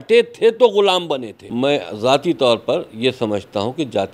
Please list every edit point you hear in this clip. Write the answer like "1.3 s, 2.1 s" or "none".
1.4 s